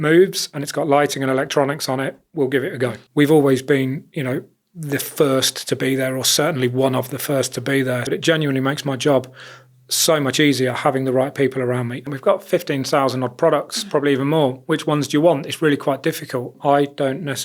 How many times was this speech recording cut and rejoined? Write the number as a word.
four